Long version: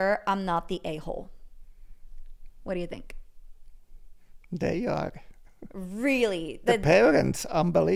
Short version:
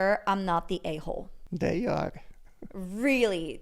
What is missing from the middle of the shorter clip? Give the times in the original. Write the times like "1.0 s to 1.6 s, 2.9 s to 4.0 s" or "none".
1.3 s to 4.3 s